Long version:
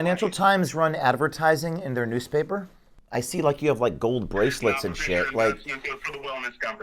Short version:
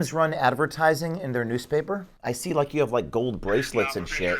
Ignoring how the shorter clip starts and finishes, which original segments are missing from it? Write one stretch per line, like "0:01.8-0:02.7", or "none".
0:02.7-0:03.0